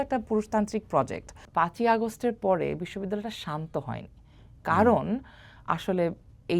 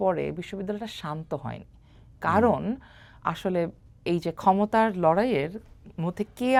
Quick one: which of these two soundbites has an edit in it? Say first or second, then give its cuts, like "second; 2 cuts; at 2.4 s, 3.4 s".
first; 1 cut; at 1.3 s